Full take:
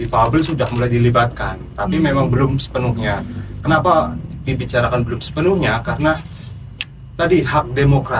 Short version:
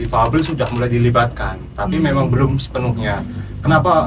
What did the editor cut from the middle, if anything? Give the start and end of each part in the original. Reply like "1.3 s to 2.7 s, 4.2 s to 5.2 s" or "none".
none